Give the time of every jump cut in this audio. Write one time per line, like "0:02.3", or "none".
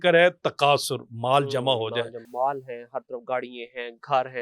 0:02.3

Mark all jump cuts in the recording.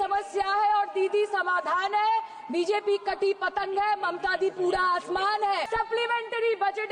0:05.6

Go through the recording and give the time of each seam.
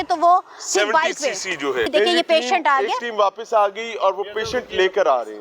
0:01.9

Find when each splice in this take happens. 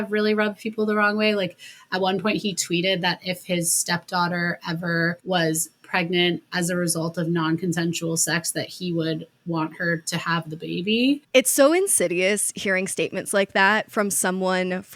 none

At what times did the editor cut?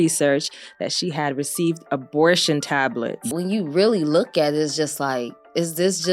0:03.3

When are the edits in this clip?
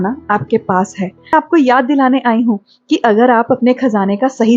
0:01.3

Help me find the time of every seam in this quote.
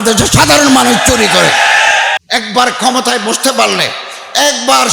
0:02.2

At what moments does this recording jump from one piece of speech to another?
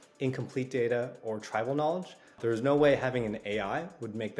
0:02.4

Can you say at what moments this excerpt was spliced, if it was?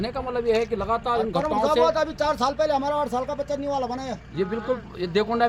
none

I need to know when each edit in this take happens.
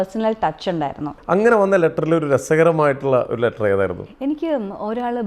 0:01.2

